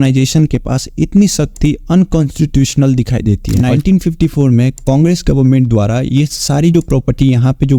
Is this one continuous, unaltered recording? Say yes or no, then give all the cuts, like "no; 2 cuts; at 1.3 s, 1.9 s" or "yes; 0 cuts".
no; 1 cut; at 3.5 s